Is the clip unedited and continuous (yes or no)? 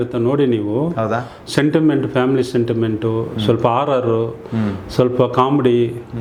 yes